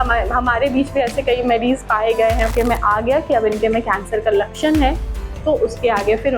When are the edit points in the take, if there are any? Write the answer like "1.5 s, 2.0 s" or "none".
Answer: 2.5 s